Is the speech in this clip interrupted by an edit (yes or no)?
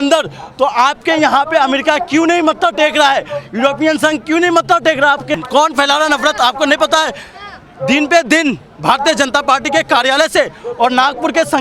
yes